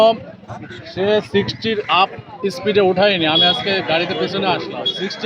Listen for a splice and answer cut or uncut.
uncut